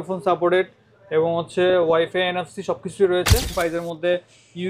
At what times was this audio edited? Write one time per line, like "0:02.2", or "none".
0:03.5